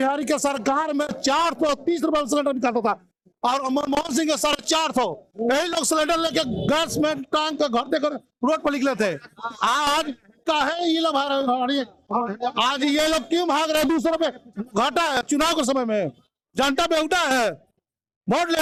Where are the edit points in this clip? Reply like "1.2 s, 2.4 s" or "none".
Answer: none